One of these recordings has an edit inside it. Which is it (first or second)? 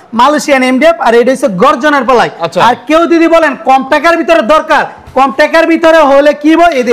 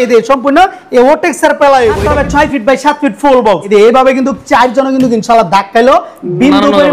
second